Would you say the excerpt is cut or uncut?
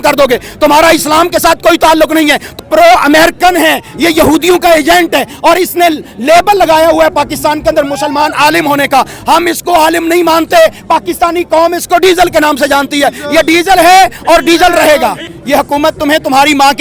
cut